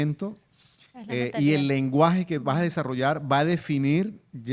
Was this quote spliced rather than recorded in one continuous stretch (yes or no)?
no